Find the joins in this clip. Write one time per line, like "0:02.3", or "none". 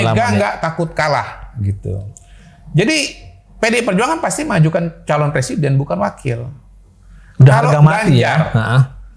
none